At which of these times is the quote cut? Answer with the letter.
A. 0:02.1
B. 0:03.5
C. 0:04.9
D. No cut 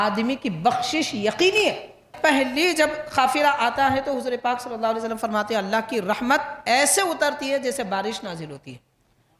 A